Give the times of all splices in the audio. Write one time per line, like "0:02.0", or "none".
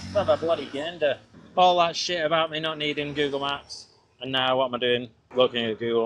0:01.3
0:05.2

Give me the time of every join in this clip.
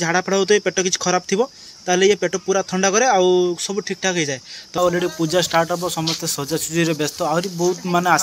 0:04.8

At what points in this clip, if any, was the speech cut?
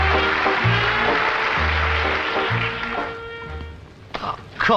0:01.7

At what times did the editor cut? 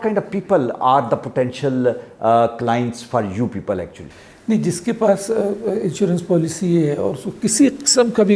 none

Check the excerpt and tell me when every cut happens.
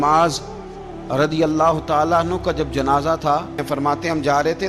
0:03.6

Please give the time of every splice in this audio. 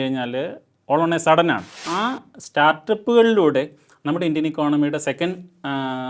0:01.9

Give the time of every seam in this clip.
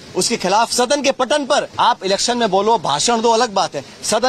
0:01.5

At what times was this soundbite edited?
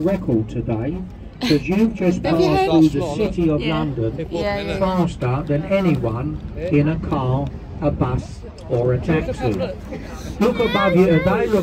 none

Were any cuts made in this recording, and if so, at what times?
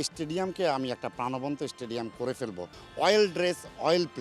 0:02.7

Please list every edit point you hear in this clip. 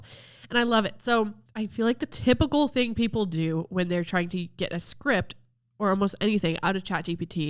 0:01.4

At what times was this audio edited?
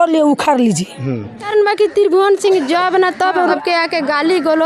0:01.2
0:03.5

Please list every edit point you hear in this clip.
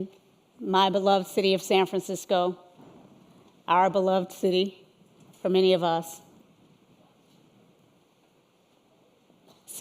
0:06.1

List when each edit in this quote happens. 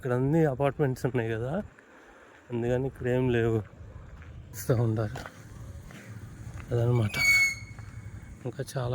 0:04.6

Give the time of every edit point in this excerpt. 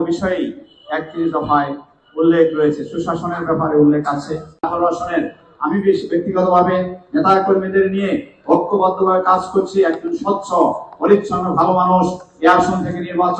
0:04.5

